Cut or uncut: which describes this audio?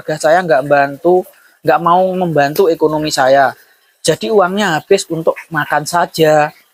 uncut